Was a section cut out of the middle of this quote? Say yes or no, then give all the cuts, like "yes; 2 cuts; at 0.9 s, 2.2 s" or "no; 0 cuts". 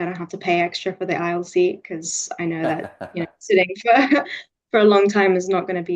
no; 0 cuts